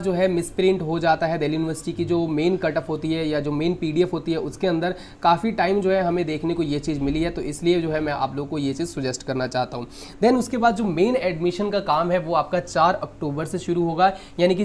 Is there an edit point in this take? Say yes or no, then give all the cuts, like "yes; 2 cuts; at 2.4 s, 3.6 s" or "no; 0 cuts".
no; 0 cuts